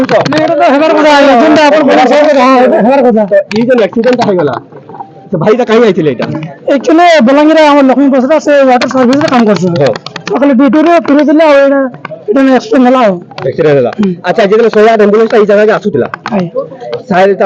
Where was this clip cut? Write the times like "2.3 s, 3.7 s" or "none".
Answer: none